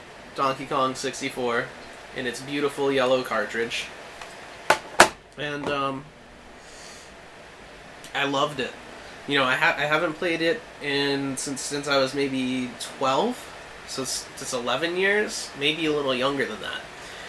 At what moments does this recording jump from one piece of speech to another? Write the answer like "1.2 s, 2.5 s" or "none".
none